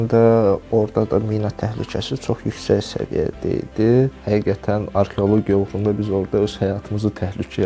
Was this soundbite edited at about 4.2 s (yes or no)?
yes